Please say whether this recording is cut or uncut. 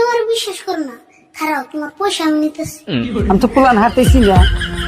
cut